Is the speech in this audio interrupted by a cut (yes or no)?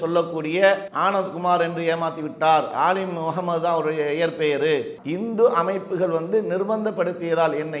yes